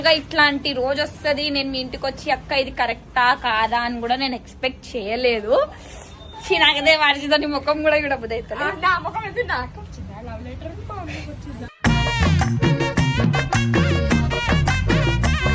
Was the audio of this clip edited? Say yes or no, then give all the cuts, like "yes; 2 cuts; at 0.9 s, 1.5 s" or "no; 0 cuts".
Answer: no; 0 cuts